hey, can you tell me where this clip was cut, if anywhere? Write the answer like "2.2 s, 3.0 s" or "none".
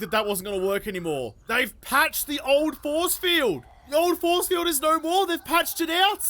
1.4 s, 3.7 s

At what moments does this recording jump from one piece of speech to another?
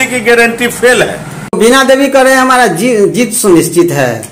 1.5 s

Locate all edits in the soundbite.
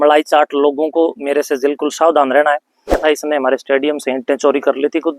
3.0 s

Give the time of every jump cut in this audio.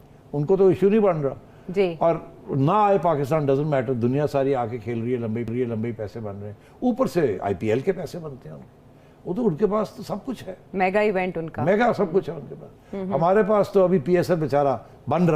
none

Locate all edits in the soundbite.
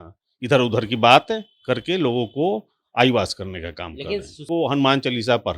4.5 s

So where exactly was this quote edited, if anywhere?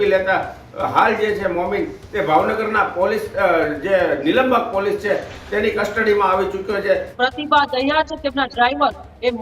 7.1 s

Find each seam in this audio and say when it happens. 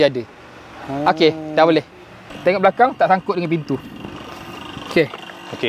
2.2 s

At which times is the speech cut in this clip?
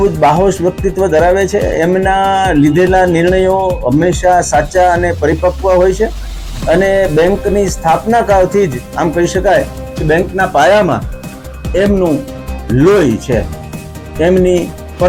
none

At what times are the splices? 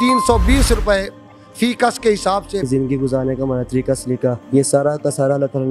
2.6 s

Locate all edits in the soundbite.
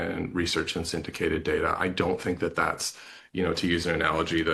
none

